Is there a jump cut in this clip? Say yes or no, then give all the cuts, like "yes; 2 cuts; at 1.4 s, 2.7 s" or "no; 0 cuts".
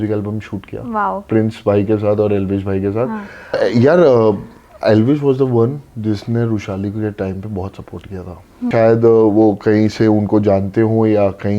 yes; 2 cuts; at 3.6 s, 8.7 s